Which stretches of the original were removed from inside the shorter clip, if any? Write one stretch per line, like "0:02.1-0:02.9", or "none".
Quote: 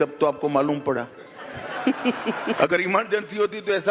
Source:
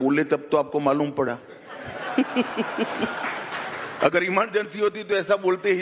0:02.9-0:04.0